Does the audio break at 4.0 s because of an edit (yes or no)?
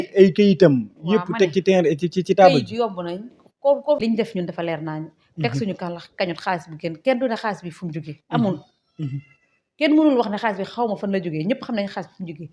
yes